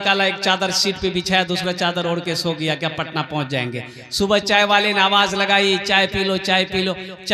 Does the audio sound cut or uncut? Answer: uncut